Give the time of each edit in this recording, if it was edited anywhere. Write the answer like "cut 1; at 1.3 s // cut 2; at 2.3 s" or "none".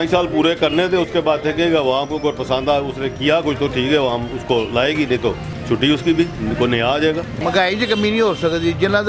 cut 1; at 5.5 s // cut 2; at 7.4 s